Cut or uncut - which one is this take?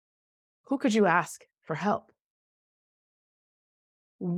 uncut